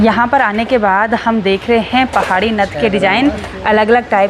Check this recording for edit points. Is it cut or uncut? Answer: uncut